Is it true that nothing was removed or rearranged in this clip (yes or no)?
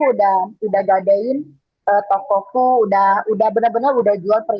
yes